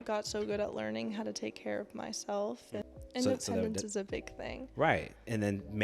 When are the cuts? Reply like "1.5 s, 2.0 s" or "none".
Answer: 2.8 s